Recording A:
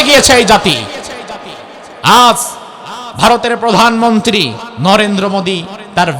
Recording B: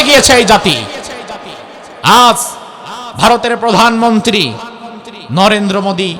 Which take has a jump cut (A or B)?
A